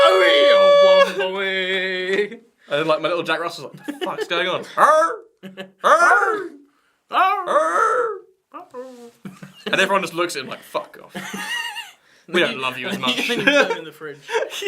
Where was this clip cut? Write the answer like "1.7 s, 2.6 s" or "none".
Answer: 1.2 s